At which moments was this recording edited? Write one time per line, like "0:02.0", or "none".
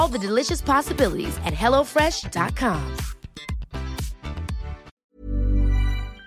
0:04.9